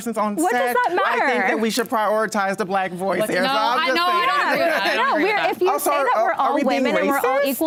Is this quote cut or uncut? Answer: uncut